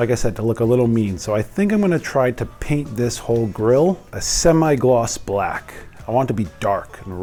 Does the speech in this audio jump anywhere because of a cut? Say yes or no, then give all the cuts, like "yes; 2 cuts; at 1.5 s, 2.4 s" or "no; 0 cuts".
no; 0 cuts